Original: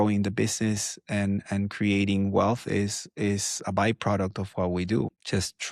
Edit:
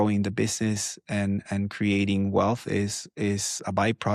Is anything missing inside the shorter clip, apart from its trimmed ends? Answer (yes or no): no